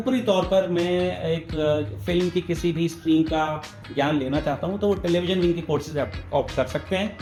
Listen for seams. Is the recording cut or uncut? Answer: uncut